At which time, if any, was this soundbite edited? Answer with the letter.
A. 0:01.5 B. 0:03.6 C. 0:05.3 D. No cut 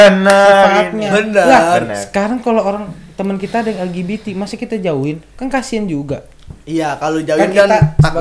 D